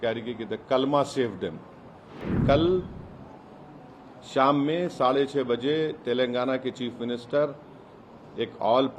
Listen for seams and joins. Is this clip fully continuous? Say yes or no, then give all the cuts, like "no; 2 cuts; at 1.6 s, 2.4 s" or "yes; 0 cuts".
no; 1 cut; at 2.3 s